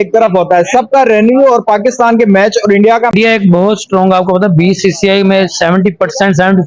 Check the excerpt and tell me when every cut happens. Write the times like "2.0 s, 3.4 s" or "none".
3.1 s